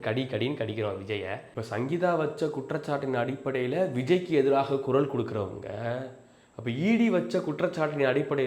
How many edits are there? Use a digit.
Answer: 1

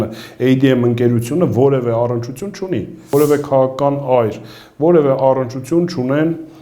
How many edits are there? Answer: 1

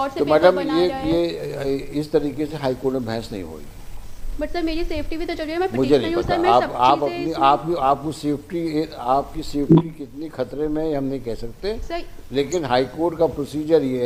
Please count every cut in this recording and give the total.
0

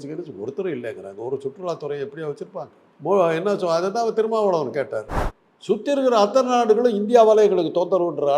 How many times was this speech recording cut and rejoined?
1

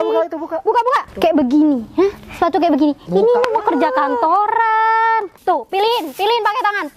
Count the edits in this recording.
2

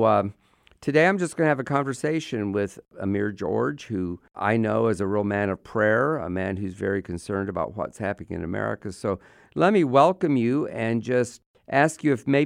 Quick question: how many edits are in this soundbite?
2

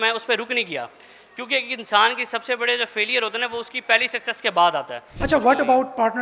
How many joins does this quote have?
1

